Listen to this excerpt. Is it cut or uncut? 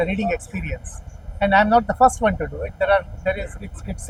uncut